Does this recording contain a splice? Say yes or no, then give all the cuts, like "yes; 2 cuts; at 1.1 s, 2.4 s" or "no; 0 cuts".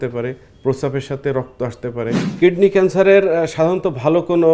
yes; 1 cut; at 2.3 s